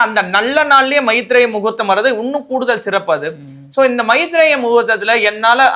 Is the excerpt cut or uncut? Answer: uncut